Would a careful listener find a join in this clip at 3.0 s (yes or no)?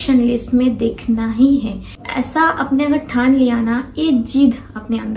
no